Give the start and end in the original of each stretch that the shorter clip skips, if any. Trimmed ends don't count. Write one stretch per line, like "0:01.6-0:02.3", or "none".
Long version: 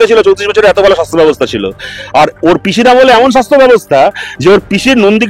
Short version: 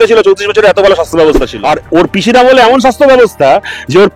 0:01.5-0:02.0